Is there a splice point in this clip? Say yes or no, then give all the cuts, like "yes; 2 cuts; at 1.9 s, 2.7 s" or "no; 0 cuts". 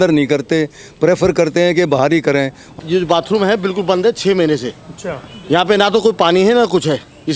yes; 1 cut; at 2.7 s